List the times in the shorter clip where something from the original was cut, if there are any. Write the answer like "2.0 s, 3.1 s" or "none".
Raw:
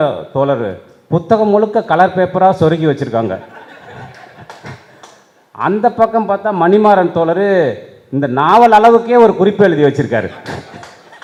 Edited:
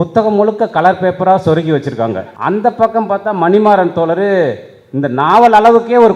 2.3 s